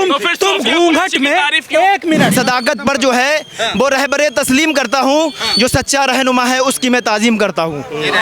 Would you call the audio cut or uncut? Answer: cut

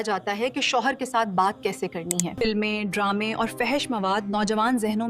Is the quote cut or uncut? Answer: cut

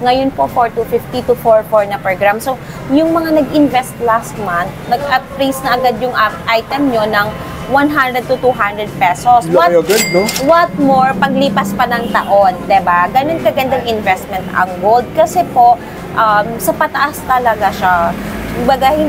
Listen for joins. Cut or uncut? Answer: uncut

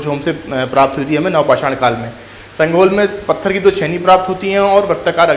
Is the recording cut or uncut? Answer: uncut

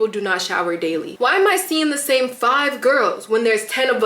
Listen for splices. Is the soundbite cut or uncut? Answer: cut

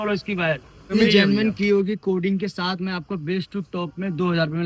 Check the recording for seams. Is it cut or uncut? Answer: cut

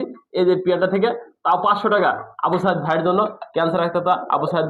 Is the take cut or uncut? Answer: uncut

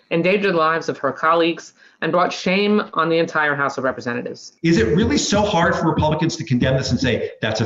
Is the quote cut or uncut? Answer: cut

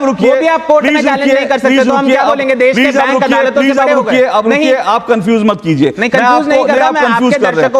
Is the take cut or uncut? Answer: uncut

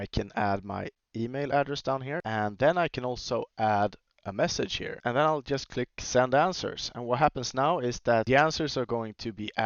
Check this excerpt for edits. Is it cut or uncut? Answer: cut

